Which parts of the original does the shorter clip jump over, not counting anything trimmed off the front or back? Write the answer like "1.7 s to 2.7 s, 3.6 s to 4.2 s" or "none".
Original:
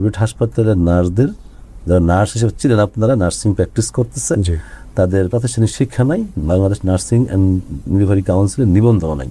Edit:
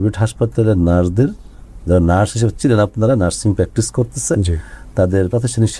none